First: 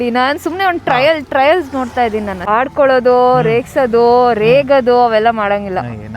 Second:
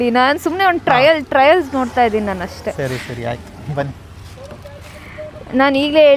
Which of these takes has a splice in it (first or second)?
first